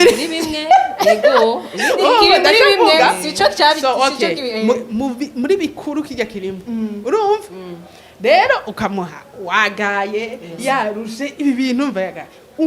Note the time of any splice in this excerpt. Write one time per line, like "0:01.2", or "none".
none